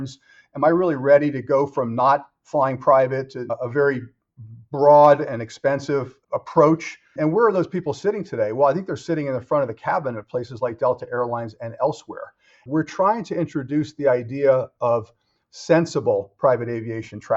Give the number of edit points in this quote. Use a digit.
3